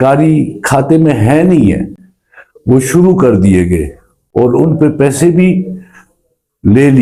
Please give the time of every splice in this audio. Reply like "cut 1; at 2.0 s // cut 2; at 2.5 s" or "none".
none